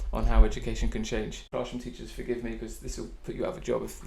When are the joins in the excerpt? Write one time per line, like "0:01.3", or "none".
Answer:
0:01.5